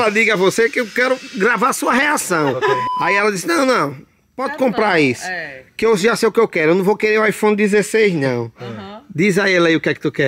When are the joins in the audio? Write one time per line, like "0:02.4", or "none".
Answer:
0:02.9